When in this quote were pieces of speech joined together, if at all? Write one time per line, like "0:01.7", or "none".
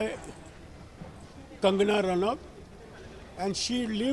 none